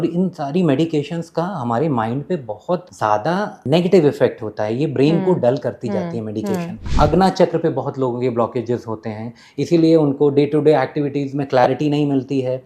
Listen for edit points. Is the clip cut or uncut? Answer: cut